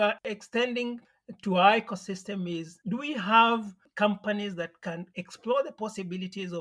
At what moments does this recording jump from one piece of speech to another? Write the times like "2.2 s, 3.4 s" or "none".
none